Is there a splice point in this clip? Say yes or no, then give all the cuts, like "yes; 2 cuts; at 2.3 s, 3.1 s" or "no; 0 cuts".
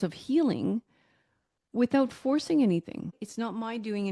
yes; 1 cut; at 3.2 s